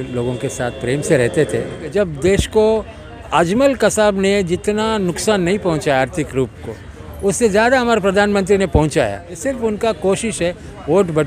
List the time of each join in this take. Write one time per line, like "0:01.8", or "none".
0:01.9
0:09.3

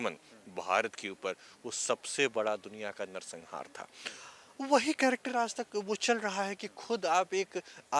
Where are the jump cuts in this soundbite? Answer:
none

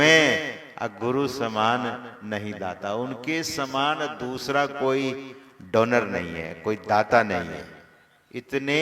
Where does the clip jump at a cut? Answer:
none

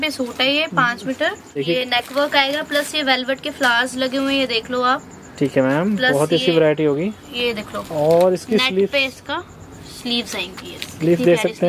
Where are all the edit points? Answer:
0:01.6

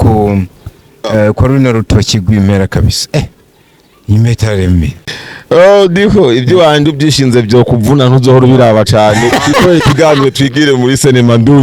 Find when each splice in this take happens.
0:05.0

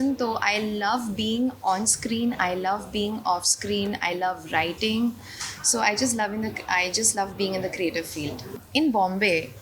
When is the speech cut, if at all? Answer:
0:08.6

